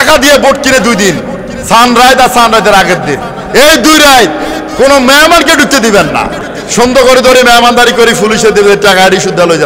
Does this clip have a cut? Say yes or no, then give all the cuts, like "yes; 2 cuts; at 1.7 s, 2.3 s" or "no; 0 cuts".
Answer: yes; 1 cut; at 6.6 s